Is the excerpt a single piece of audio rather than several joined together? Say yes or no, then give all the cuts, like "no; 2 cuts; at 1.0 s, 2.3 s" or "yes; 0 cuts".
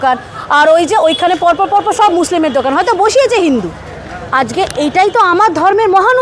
no; 1 cut; at 4.2 s